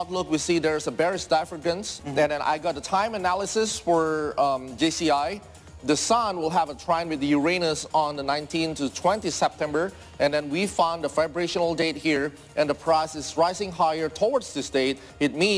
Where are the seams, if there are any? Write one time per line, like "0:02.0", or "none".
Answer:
0:01.9

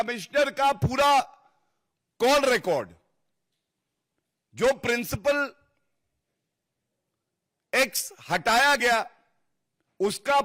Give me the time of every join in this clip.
none

